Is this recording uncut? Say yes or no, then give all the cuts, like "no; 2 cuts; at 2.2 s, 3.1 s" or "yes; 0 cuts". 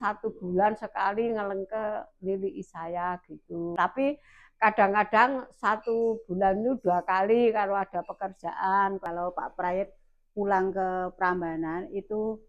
no; 2 cuts; at 3.7 s, 9.0 s